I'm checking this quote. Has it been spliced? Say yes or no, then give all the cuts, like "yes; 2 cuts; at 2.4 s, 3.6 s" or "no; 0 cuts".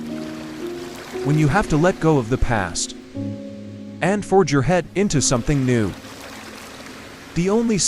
yes; 1 cut; at 1.3 s